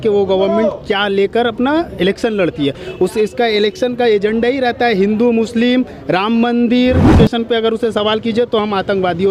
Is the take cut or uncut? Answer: cut